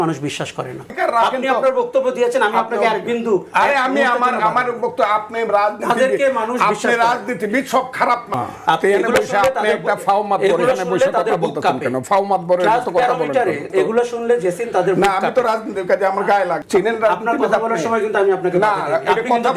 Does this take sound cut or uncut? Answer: cut